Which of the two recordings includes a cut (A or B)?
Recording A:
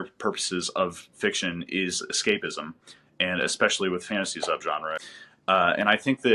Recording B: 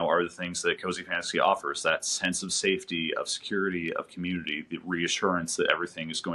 A